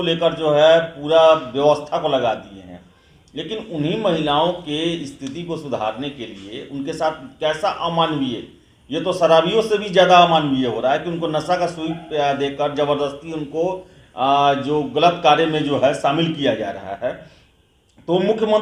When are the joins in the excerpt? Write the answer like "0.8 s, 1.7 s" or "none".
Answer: none